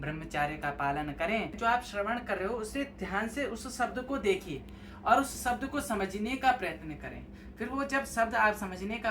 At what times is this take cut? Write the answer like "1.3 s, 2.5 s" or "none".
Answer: 1.6 s